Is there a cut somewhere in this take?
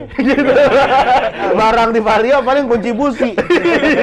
yes; 1 cut; at 1.5 s

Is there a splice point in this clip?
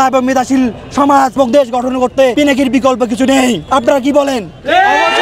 yes; 3 cuts; at 1.3 s, 2.3 s, 3.6 s

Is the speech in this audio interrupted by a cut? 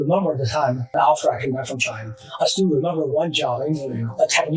yes; 1 cut; at 0.9 s

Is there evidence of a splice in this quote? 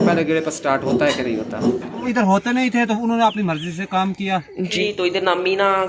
yes; 2 cuts; at 2.0 s, 4.7 s

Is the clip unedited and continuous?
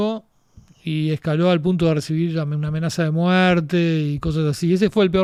yes; 0 cuts

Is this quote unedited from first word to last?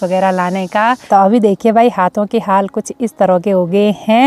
yes; 0 cuts

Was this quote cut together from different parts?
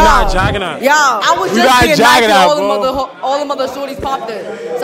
yes; 1 cut; at 1.2 s

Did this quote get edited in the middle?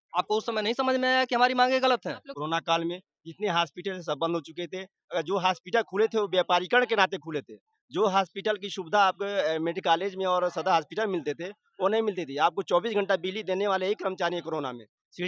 yes; 1 cut; at 2.3 s

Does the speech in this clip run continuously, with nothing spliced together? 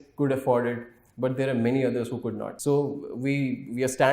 no; 1 cut; at 2.5 s

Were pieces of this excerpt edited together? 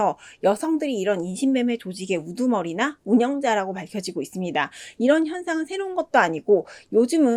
no; 0 cuts

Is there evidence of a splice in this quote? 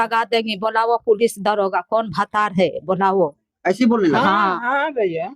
no; 0 cuts

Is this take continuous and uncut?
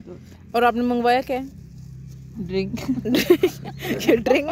yes; 0 cuts

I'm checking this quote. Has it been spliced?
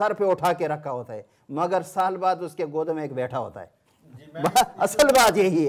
no; 0 cuts

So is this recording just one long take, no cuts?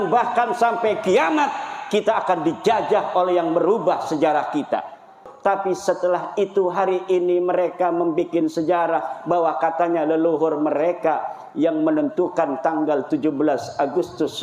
no; 1 cut; at 5.2 s

